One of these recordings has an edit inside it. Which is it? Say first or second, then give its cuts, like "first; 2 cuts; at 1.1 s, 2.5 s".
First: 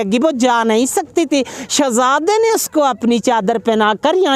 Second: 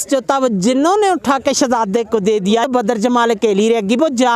second; 1 cut; at 2.7 s